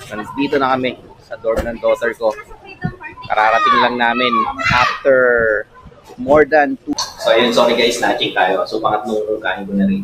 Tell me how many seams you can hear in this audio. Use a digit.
1